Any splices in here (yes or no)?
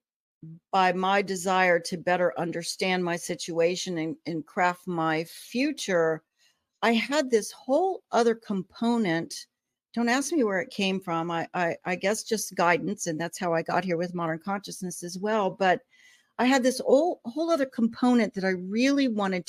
no